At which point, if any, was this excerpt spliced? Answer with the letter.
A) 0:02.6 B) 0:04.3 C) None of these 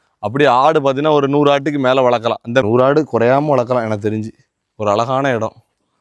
A